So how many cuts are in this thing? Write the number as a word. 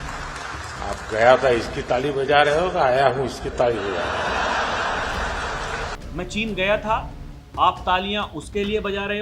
one